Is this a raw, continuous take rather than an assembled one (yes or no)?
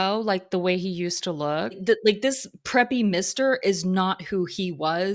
no